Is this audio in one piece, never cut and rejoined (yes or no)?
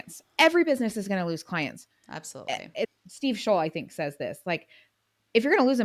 yes